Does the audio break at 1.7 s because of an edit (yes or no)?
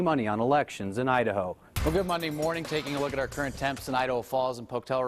yes